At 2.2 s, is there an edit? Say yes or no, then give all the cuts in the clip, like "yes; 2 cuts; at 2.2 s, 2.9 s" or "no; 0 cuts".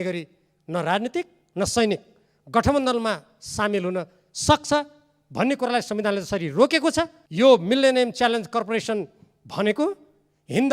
no; 1 cut; at 7.2 s